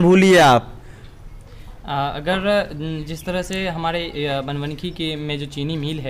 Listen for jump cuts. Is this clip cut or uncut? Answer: uncut